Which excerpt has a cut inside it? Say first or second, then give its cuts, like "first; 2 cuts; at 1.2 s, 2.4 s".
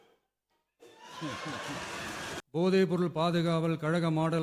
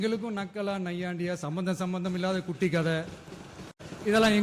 first; 1 cut; at 2.4 s